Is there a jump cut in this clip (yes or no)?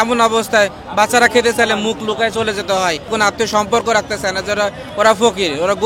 yes